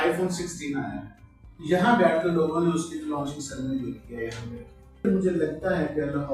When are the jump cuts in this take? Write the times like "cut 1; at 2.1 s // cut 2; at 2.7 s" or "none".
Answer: cut 1; at 5.1 s